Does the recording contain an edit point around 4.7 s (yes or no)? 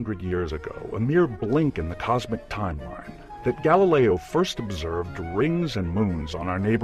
no